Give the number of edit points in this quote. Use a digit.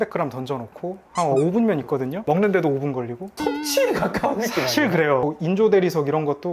1